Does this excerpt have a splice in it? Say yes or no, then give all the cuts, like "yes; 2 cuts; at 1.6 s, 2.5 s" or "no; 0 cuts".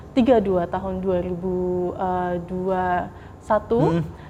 no; 0 cuts